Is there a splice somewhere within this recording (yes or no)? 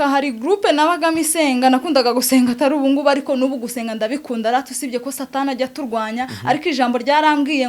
no